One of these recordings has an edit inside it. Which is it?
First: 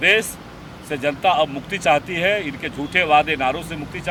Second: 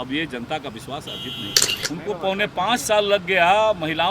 second; 1 cut; at 1.8 s

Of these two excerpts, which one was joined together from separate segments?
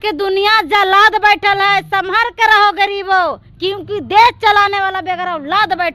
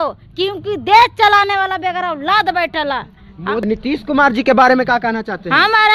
second; 1 cut; at 3.6 s

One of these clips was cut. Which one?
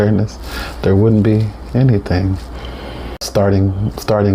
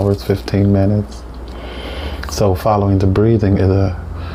first; 1 cut; at 3.3 s

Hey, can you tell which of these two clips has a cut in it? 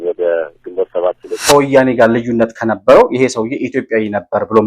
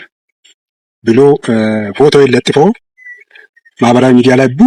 first; 1 cut; at 1.2 s

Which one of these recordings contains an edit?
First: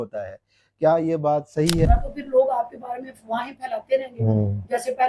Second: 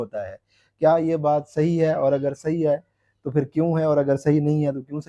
first; 1 cut; at 1.9 s

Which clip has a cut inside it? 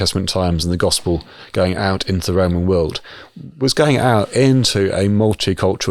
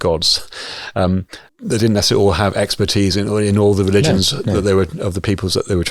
second; 1 cut; at 1.4 s

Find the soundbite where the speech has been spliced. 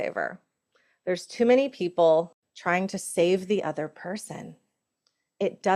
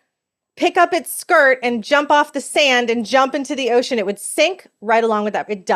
first; 1 cut; at 2.4 s

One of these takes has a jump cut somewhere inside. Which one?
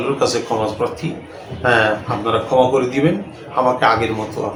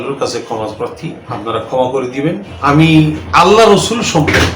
second; 3 cuts; at 1.3 s, 2.5 s, 3.2 s

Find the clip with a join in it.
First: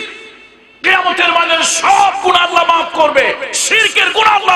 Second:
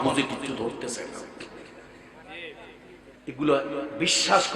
second; 1 cut; at 3.2 s

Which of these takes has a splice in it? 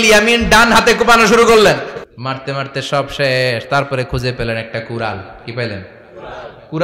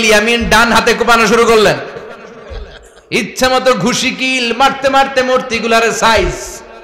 first; 1 cut; at 2.0 s

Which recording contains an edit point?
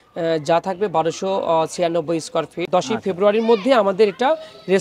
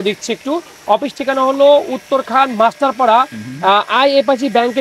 first; 1 cut; at 2.6 s

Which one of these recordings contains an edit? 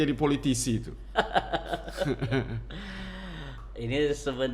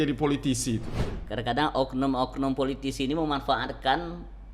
second; 1 cut; at 1.0 s

